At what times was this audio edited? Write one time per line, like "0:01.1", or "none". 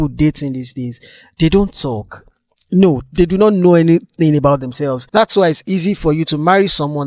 0:05.0